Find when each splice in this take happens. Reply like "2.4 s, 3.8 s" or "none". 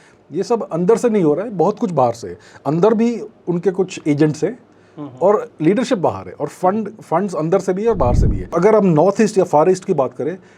8.5 s